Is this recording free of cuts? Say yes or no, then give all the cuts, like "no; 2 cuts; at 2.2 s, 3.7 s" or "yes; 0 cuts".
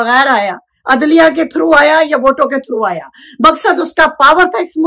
yes; 0 cuts